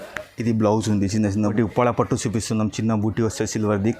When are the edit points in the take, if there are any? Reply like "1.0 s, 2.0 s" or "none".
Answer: 1.5 s